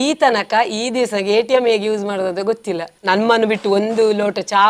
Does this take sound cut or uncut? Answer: cut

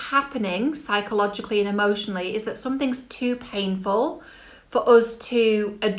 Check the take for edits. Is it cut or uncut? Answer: uncut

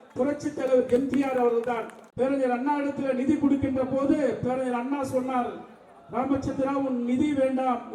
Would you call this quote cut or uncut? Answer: cut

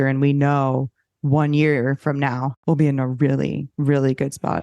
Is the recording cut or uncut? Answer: cut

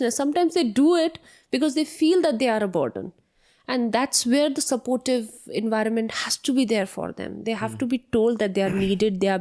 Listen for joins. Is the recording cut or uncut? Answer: uncut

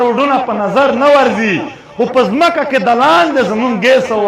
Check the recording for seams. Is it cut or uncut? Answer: uncut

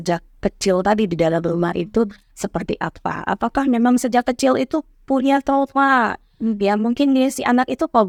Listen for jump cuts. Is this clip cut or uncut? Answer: uncut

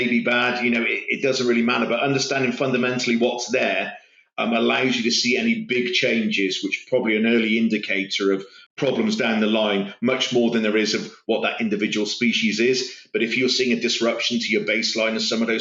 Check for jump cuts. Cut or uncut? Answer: cut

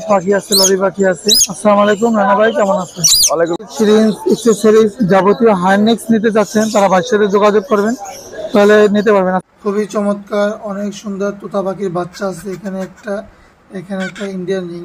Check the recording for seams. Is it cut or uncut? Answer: cut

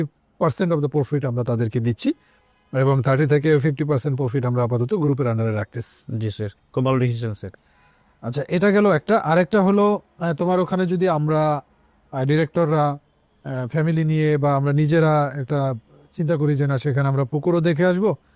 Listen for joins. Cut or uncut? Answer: uncut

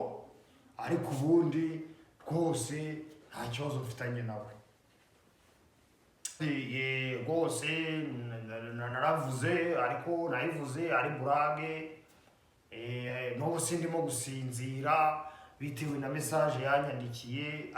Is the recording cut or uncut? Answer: cut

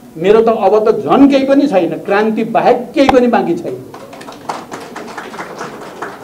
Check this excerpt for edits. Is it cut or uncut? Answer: uncut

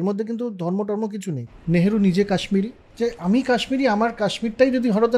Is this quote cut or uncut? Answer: cut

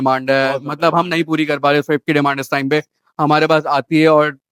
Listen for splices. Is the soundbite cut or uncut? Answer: uncut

